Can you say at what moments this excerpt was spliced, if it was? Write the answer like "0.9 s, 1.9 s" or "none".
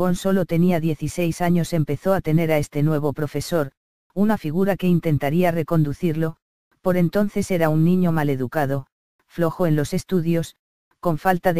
6.7 s